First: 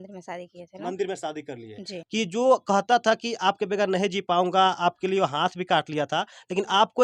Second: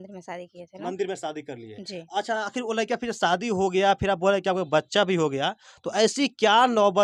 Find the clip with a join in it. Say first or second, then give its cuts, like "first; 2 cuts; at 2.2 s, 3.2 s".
first; 1 cut; at 1.9 s